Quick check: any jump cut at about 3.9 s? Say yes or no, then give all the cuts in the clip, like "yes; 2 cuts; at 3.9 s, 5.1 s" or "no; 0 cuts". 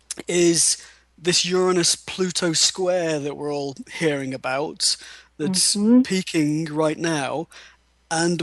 no; 1 cut; at 5.3 s